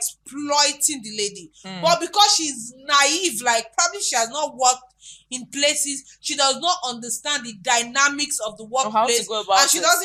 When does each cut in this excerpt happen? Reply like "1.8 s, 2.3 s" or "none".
none